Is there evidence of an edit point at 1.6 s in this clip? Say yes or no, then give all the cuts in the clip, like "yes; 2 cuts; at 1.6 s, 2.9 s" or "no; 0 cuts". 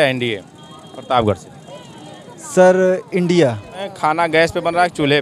no; 1 cut; at 3.9 s